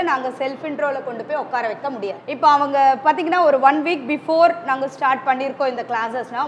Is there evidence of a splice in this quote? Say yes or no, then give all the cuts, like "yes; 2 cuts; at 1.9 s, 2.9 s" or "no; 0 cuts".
yes; 1 cut; at 2.2 s